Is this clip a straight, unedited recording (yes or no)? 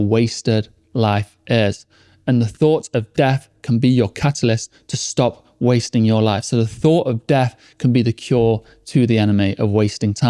yes